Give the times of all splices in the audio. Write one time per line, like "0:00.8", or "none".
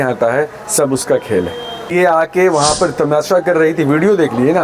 0:01.9